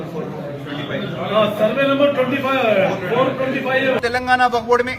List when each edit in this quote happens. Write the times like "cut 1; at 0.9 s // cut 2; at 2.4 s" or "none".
cut 1; at 4.0 s